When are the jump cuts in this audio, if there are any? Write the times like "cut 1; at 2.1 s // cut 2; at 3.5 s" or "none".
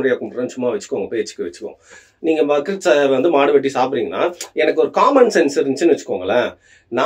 none